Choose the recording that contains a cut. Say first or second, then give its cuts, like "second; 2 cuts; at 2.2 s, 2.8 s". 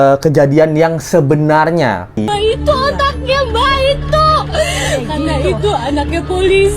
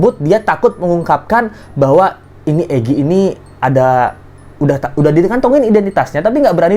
first; 1 cut; at 2.3 s